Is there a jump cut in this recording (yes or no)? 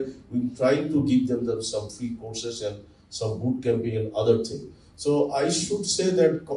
no